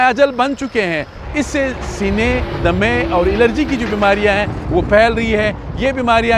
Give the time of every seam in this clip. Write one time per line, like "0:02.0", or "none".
0:01.2